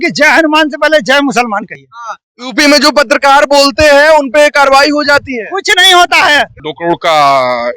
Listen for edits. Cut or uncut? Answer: cut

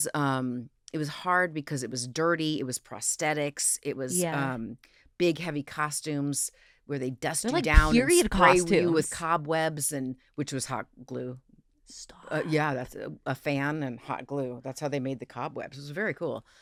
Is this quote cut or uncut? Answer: uncut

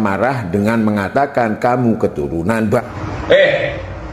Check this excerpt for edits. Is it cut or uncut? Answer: cut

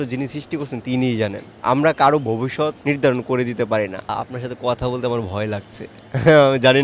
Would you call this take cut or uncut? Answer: cut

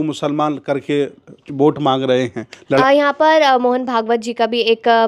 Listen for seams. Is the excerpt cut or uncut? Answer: cut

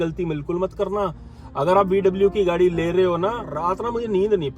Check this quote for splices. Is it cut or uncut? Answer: cut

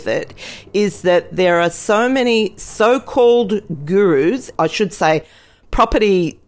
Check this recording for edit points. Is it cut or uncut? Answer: cut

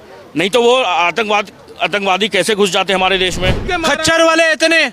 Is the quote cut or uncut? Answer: cut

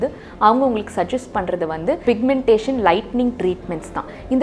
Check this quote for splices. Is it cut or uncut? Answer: cut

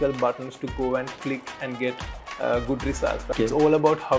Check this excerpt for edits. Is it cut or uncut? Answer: cut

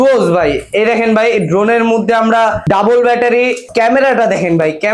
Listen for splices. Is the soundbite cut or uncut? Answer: cut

